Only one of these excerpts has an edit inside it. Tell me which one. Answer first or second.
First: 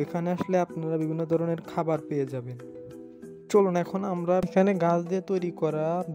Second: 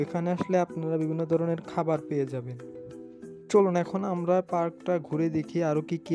first